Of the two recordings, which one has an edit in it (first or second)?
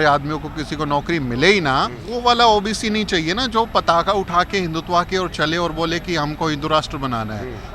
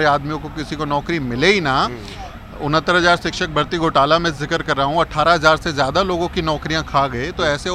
first